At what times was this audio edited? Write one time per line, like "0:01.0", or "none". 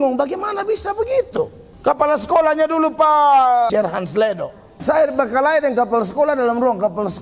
0:01.6
0:03.7
0:04.8